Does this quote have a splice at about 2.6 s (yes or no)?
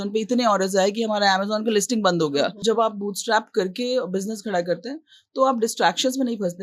yes